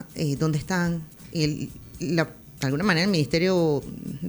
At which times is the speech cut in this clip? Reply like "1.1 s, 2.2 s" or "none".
1.2 s, 2.4 s